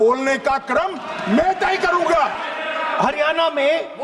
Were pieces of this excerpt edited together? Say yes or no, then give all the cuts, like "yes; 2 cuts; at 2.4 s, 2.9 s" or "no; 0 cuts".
yes; 1 cut; at 2.4 s